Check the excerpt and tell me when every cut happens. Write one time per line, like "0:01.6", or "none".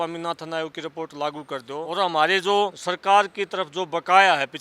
0:01.8
0:02.9